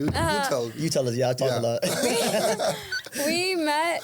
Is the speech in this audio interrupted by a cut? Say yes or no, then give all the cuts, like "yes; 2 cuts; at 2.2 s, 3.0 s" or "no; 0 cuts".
no; 0 cuts